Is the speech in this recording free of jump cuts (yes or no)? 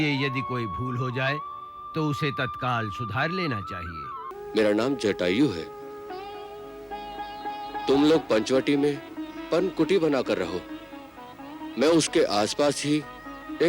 no